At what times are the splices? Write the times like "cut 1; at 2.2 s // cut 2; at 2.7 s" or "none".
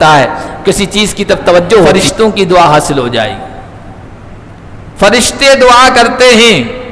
cut 1; at 1.9 s